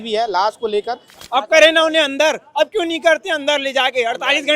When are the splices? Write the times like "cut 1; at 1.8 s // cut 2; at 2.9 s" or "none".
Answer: cut 1; at 1.1 s

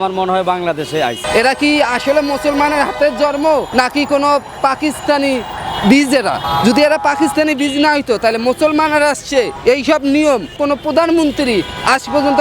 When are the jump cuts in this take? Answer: cut 1; at 1.2 s // cut 2; at 3.7 s // cut 3; at 6.4 s // cut 4; at 9.5 s // cut 5; at 10.5 s

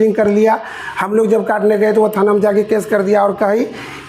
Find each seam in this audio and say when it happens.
none

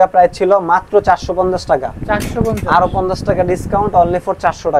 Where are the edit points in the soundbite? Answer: none

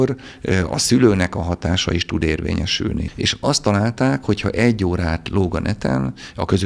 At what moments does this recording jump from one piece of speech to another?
cut 1; at 3.0 s

